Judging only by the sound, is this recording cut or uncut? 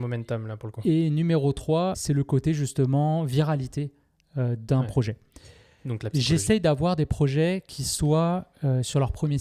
cut